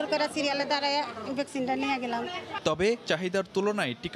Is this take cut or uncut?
uncut